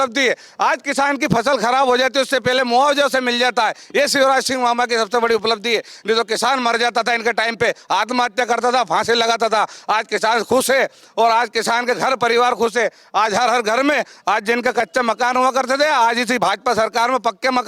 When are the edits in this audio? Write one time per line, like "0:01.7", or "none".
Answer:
none